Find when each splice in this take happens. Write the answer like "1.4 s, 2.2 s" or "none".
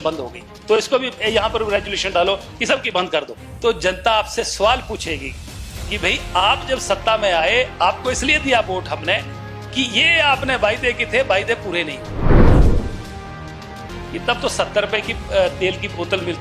3.4 s, 13.9 s